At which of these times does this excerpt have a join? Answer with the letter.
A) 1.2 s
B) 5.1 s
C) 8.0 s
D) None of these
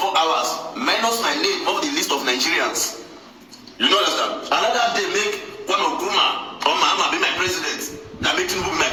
D